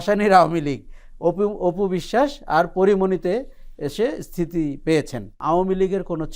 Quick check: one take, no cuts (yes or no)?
no